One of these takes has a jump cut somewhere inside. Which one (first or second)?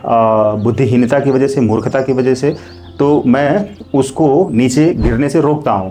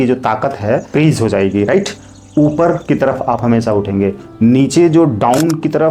second